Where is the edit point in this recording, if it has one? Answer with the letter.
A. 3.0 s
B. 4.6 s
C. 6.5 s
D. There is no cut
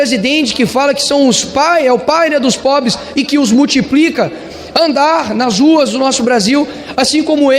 D